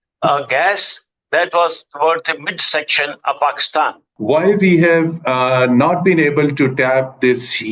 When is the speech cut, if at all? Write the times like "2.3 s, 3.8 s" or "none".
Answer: 4.1 s